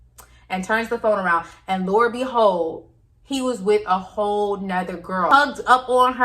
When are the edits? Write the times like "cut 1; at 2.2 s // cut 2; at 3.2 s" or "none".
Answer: cut 1; at 5.3 s